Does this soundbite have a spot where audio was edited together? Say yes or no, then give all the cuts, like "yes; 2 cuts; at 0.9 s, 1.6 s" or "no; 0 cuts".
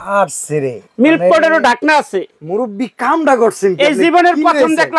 no; 0 cuts